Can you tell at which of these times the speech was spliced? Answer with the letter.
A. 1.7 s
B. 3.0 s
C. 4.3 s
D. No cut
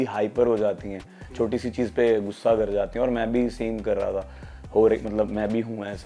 D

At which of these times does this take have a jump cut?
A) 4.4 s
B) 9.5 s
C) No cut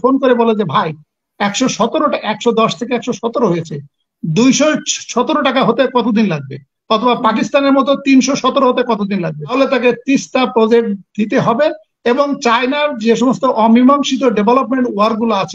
B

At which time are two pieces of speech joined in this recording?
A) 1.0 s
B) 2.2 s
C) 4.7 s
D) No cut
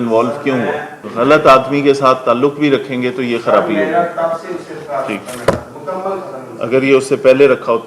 A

